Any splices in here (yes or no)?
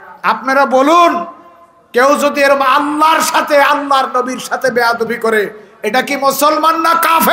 no